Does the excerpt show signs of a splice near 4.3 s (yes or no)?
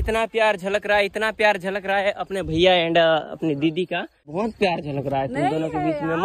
yes